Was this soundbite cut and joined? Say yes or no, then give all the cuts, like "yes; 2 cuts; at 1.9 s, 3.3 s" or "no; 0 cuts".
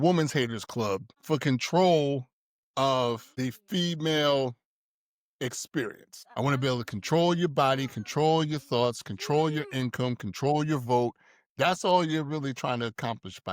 yes; 3 cuts; at 1.1 s, 3.3 s, 6.1 s